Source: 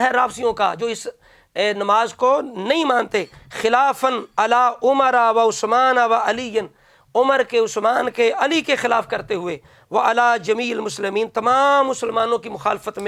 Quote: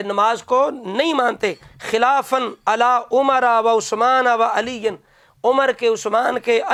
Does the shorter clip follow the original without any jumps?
yes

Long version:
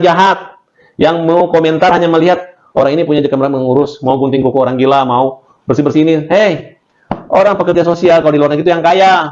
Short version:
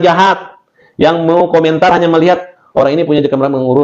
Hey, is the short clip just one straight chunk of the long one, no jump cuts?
yes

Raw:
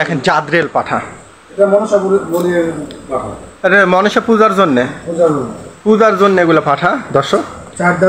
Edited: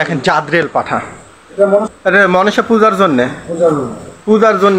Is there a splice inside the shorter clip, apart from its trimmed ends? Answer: yes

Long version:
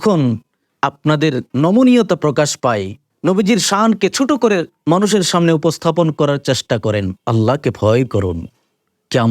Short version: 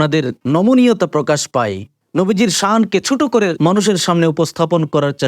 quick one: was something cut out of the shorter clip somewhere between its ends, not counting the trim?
yes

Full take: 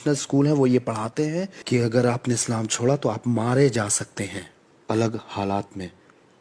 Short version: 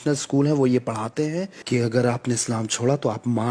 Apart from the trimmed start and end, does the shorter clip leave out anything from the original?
no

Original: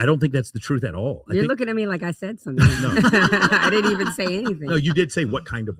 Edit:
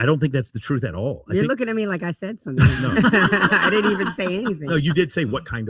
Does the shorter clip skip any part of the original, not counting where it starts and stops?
no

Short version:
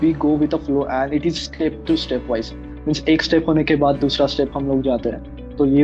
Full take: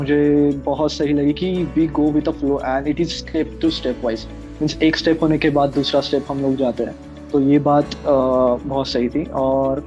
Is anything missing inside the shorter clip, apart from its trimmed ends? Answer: no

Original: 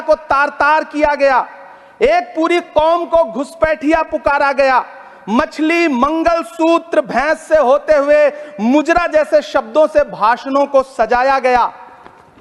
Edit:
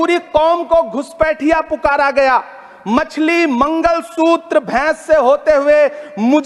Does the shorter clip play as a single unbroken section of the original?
yes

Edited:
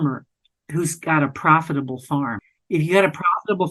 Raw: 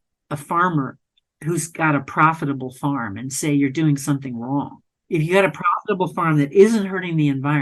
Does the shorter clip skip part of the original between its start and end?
yes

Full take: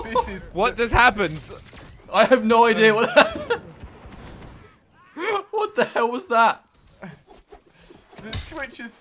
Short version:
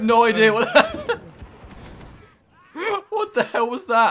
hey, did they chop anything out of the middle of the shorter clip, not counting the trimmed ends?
no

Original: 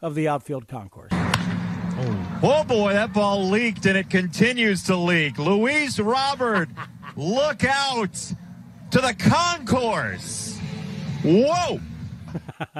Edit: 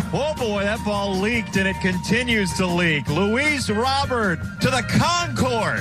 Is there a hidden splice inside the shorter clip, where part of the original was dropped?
yes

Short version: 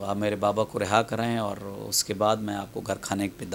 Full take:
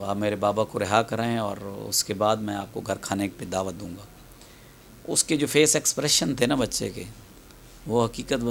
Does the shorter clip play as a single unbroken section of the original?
yes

